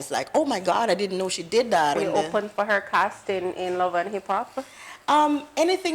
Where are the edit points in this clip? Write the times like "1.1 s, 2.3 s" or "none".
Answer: 1.9 s